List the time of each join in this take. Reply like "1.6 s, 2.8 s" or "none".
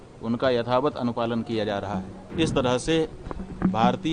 2.2 s